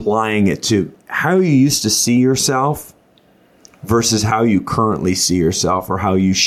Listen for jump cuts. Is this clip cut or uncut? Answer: cut